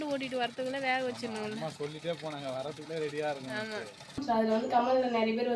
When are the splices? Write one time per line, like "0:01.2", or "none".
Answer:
0:04.2